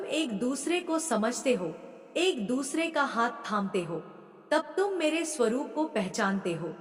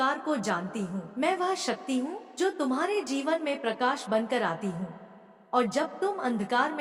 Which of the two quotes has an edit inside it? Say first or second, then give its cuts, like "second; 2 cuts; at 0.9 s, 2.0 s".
second; 1 cut; at 1.1 s